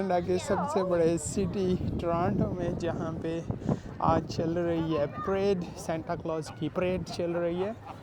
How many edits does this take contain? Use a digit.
1